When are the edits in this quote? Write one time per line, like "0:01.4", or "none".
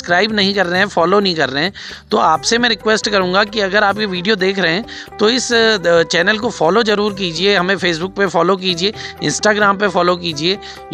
none